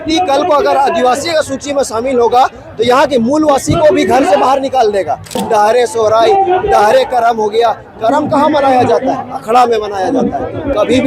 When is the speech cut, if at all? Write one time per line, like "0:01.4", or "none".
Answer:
0:05.3